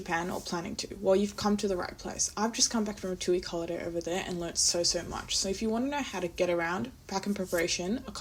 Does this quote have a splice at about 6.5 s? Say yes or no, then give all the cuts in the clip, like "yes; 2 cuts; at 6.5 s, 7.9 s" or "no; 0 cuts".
no; 0 cuts